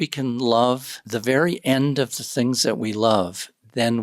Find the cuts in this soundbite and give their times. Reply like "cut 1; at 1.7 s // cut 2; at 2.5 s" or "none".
cut 1; at 0.9 s